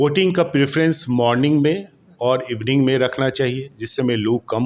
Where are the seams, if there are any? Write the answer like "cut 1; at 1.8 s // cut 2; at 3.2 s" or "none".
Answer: none